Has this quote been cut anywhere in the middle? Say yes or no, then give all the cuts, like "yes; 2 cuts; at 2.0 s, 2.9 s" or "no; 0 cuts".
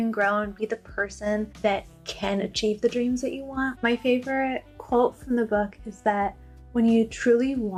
no; 0 cuts